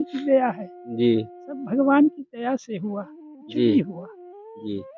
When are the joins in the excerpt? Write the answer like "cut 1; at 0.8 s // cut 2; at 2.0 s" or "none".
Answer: none